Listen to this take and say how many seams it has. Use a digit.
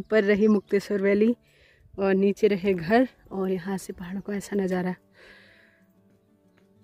0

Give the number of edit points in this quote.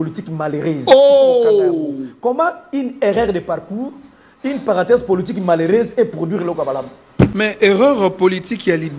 1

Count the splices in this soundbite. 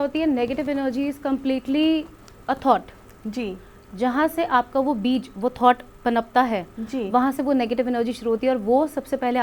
0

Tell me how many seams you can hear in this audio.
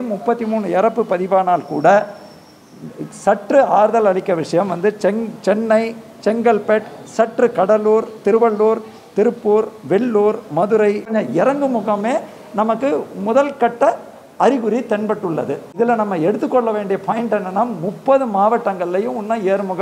2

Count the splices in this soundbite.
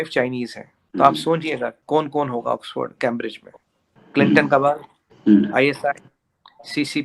1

